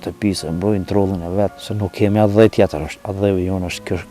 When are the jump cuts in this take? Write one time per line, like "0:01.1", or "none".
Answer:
0:01.6
0:03.0